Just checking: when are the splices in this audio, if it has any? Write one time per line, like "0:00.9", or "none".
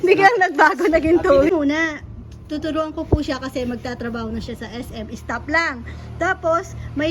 0:01.5